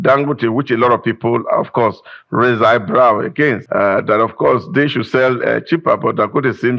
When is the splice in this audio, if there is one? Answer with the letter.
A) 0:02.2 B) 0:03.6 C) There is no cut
B